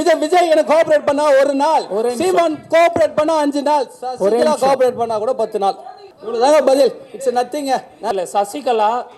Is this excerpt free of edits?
no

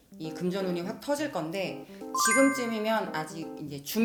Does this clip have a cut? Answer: no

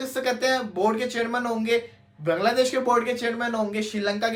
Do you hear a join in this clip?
no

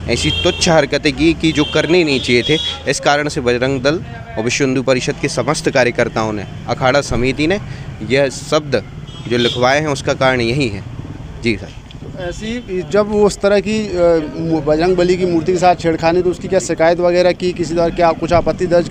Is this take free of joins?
yes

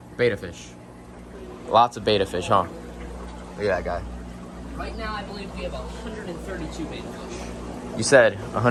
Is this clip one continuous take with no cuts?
yes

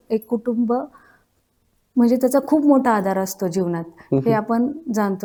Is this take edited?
no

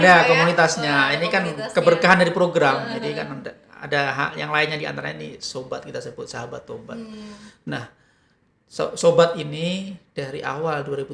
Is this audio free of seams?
yes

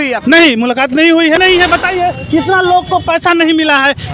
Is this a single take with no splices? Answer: no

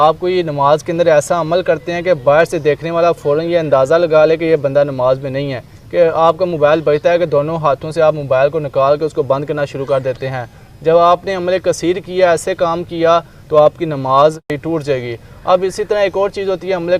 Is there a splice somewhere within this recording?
yes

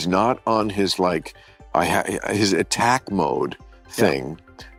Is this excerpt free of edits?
yes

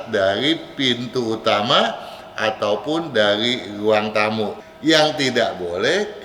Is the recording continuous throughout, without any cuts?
no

